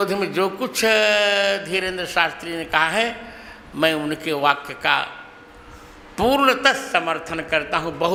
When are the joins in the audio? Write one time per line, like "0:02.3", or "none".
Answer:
none